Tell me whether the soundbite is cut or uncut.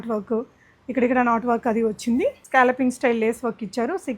cut